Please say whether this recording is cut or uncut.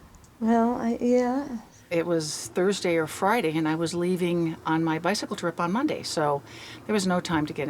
cut